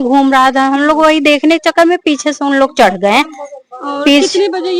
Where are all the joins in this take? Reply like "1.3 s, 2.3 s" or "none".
none